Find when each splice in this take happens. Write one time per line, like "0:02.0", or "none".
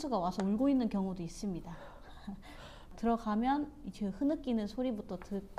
0:02.9